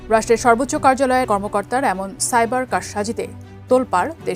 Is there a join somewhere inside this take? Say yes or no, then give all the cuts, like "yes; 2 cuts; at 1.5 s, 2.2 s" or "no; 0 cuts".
yes; 1 cut; at 1.2 s